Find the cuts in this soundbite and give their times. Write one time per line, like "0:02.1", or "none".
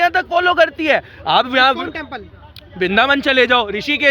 none